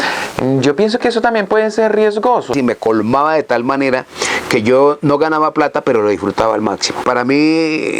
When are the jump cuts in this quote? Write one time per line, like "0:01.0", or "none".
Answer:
0:02.5
0:07.0